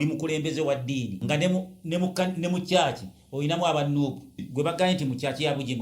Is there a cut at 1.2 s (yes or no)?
yes